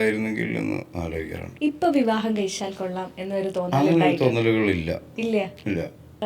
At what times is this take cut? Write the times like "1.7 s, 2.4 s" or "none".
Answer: 1.4 s